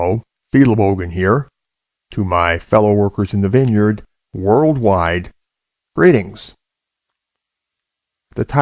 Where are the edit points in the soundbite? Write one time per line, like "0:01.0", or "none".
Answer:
none